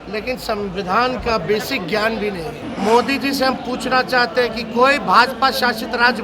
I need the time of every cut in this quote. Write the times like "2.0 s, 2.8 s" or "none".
2.7 s